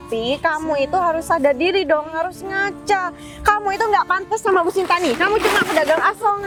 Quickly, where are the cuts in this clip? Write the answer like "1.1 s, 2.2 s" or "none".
none